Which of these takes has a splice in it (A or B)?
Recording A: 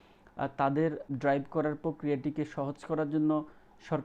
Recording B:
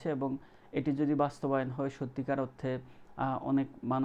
A